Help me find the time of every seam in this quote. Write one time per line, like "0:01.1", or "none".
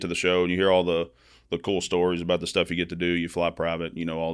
none